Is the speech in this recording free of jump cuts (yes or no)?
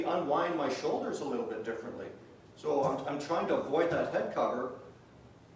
yes